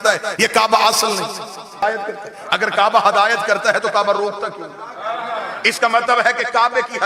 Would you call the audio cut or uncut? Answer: cut